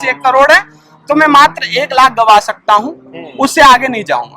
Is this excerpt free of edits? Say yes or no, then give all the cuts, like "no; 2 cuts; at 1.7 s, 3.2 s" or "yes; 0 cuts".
yes; 0 cuts